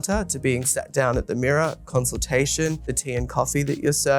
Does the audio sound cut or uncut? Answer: cut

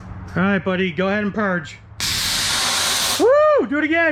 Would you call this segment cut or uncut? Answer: uncut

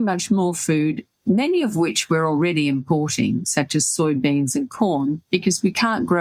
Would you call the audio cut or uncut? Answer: uncut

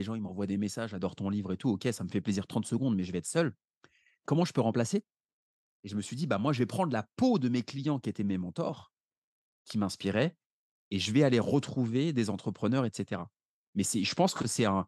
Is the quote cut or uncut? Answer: uncut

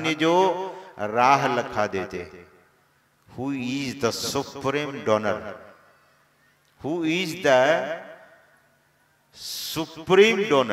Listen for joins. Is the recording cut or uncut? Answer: uncut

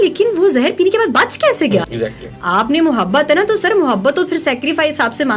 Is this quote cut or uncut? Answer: cut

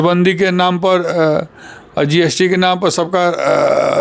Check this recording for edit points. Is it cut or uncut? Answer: uncut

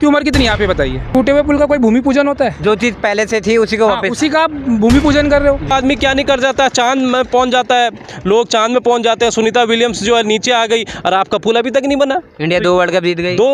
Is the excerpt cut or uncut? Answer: cut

